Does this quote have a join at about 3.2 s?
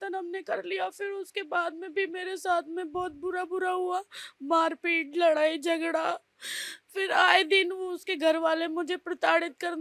no; 0 cuts

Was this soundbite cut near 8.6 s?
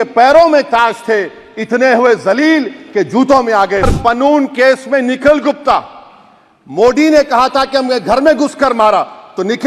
no; 1 cut; at 3.9 s

